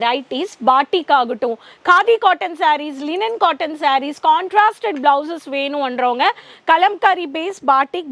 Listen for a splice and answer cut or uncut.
uncut